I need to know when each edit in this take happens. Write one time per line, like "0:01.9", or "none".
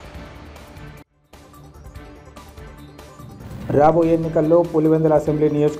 0:02.7